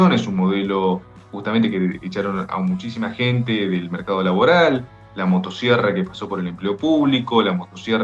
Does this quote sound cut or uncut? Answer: uncut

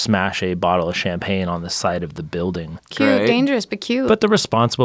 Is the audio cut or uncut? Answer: uncut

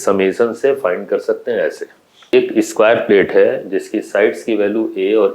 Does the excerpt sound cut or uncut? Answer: cut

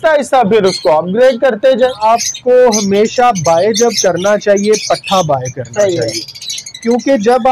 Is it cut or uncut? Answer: cut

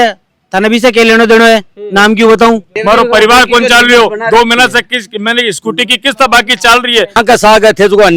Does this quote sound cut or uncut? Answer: cut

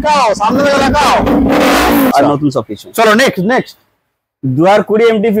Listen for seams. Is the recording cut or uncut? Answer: cut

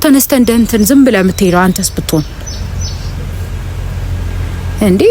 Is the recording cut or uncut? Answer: uncut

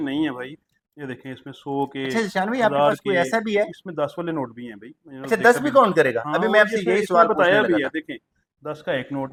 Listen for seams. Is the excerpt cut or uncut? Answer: uncut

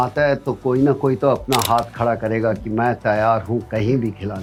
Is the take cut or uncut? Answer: uncut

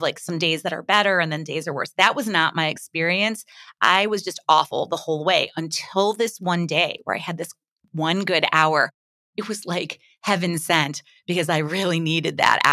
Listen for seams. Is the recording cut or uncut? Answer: uncut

